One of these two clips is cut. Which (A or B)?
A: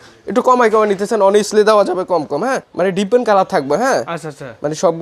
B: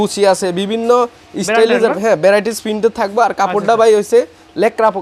A